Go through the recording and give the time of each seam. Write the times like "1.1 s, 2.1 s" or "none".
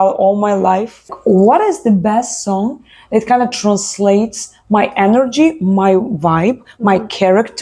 1.1 s